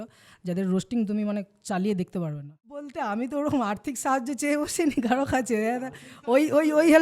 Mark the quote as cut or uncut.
cut